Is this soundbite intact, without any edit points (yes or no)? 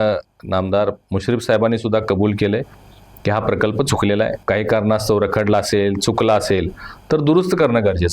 no